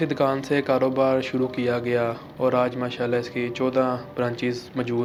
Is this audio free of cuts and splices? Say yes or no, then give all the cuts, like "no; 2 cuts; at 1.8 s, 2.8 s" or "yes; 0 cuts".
yes; 0 cuts